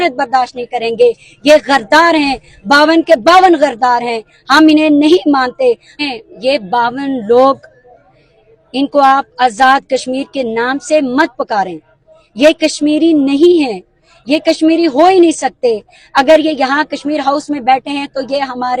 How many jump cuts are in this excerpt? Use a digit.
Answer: 1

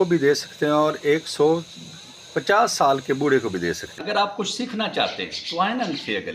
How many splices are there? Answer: 1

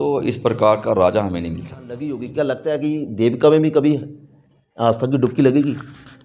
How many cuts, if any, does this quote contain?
1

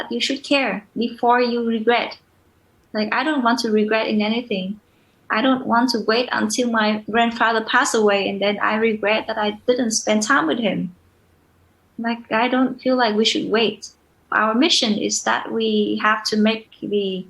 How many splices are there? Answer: 2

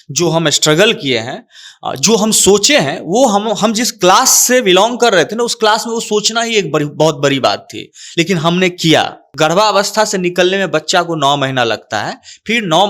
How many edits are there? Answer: 1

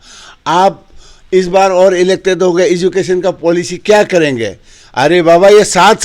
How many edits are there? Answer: 0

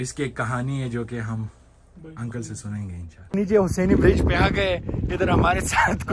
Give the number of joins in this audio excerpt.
1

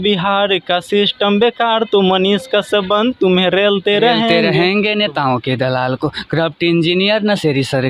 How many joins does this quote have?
1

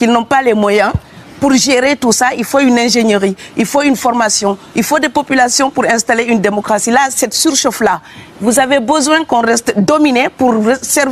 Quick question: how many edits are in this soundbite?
0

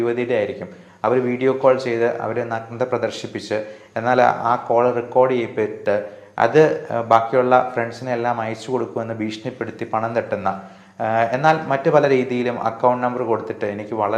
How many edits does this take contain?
0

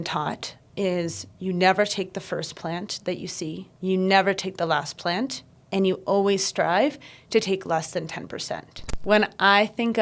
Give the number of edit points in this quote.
2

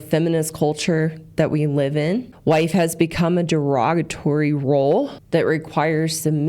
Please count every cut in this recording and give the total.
2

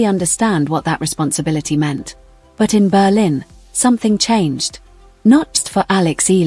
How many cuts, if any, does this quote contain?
1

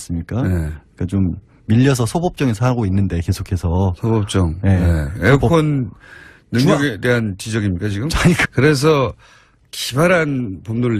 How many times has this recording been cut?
0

